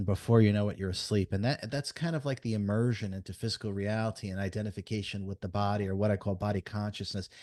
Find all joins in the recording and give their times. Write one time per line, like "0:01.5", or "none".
none